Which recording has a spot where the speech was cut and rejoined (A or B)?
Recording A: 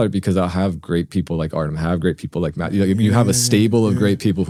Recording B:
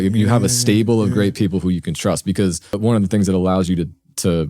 B